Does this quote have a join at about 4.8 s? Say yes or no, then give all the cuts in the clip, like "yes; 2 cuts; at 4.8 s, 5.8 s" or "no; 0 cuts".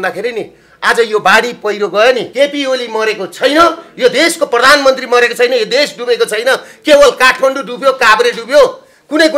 no; 1 cut; at 2.3 s